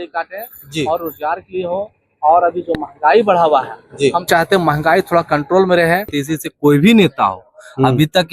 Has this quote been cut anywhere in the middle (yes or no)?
yes